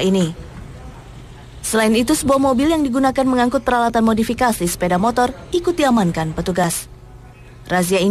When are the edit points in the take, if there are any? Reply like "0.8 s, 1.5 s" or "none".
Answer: 5.9 s